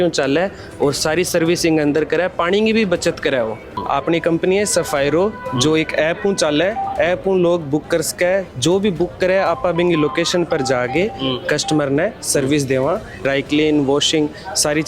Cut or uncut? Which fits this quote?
cut